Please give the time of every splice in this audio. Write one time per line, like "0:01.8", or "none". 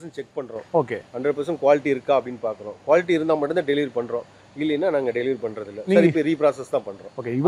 none